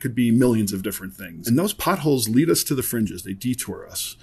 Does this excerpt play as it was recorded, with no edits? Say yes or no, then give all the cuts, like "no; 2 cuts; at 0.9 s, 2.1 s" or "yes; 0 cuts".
no; 1 cut; at 1.3 s